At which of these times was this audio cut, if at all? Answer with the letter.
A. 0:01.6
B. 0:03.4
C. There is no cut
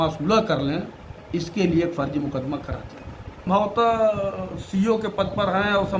B